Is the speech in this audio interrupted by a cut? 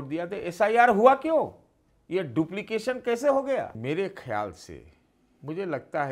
yes; 1 cut; at 3.8 s

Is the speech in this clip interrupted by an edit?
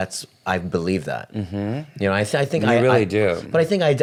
no; 0 cuts

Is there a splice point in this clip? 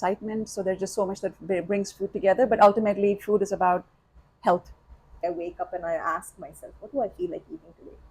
yes; 1 cut; at 5.1 s

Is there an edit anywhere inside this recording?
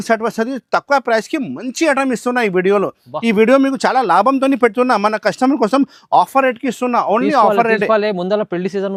no; 0 cuts

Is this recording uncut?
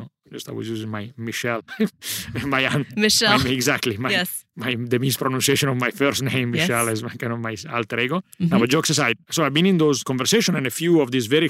yes; 0 cuts

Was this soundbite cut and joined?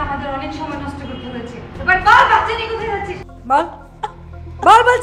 yes; 1 cut; at 3.3 s

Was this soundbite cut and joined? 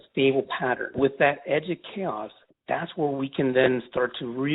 yes; 1 cut; at 0.9 s

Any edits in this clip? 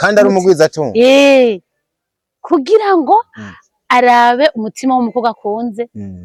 no; 0 cuts

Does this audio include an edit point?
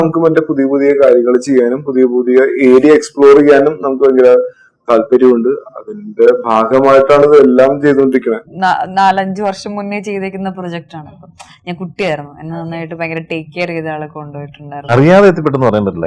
yes; 2 cuts; at 8.5 s, 14.8 s

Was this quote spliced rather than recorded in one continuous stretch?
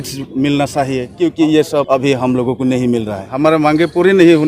yes; 3 cuts; at 1.0 s, 1.9 s, 3.3 s

